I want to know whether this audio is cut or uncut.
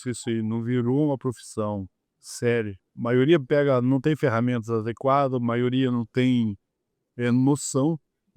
cut